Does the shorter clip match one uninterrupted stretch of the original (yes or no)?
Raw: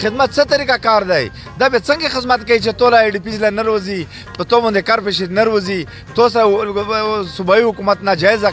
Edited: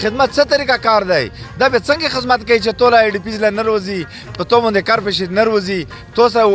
yes